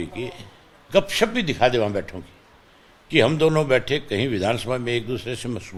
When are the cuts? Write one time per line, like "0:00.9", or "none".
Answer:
none